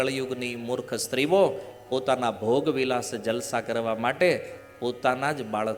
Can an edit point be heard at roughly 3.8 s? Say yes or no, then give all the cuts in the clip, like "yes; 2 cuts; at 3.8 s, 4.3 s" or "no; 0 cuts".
no; 0 cuts